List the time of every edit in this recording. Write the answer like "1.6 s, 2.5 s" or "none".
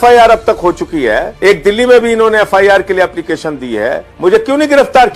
1.3 s, 4.1 s